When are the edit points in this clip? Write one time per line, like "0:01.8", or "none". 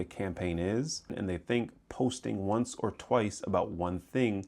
0:01.1